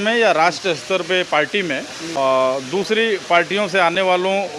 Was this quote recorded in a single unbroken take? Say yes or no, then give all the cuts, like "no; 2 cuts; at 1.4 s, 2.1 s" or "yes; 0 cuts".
no; 1 cut; at 2.0 s